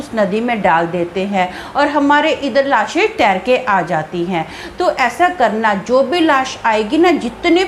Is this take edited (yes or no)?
no